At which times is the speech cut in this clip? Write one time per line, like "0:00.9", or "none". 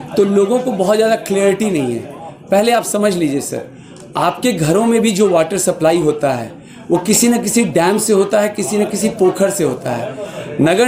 none